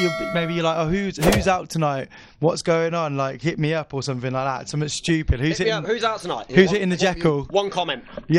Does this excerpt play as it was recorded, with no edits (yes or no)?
yes